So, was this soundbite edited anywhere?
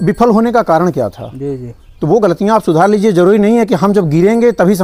no; 0 cuts

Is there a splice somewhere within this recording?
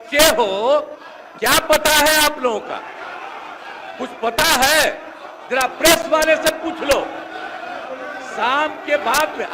no; 0 cuts

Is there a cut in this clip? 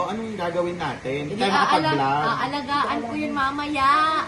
no; 0 cuts

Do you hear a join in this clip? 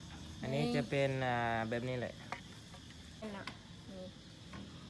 yes; 1 cut; at 3.2 s

